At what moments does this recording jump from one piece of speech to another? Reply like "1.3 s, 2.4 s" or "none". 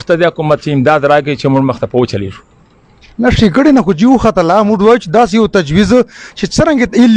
none